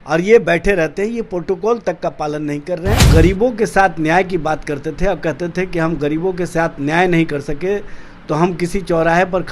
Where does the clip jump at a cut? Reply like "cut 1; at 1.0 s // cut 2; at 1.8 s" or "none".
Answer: cut 1; at 3.1 s